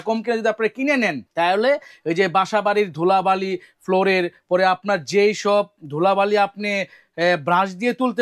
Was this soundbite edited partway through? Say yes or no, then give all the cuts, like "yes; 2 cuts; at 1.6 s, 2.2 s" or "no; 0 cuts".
yes; 1 cut; at 1.2 s